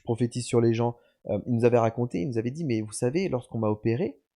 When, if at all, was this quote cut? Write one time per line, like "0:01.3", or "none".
0:01.1